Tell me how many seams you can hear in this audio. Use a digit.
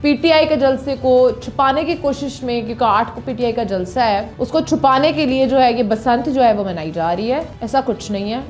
2